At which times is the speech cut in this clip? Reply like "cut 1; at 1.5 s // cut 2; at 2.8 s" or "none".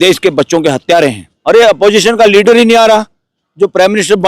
cut 1; at 1.3 s